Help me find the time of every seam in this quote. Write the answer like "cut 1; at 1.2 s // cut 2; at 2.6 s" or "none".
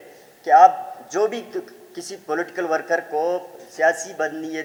none

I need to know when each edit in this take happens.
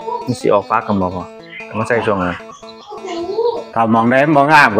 none

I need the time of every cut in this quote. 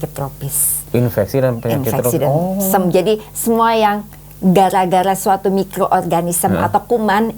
none

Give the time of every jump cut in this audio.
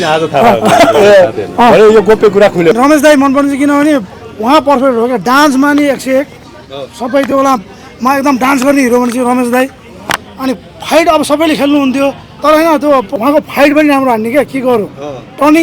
cut 1; at 2.8 s // cut 2; at 12.3 s // cut 3; at 13.1 s

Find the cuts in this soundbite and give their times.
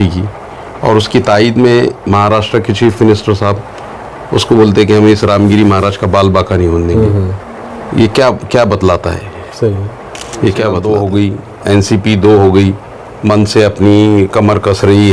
cut 1; at 10.8 s

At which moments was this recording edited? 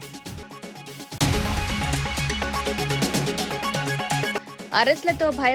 cut 1; at 1.2 s // cut 2; at 4.2 s

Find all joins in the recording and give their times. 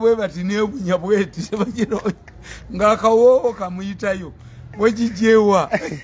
none

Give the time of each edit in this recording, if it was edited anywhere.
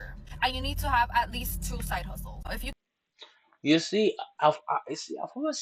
none

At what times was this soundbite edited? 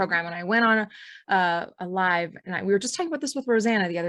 none

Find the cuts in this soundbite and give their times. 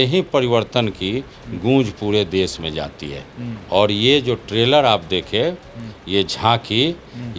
none

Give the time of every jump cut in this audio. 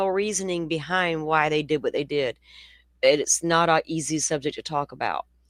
none

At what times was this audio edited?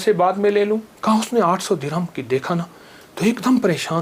cut 1; at 0.9 s

